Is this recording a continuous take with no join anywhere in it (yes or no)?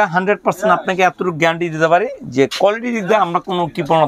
yes